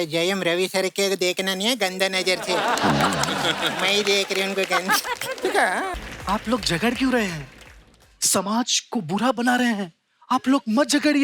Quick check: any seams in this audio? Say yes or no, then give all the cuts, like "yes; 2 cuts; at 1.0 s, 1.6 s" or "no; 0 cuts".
yes; 1 cut; at 5.9 s